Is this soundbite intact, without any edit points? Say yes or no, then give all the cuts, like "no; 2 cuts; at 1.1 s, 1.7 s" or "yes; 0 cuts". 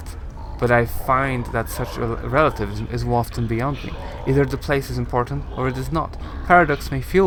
yes; 0 cuts